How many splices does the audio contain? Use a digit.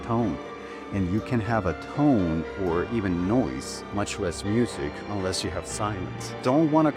0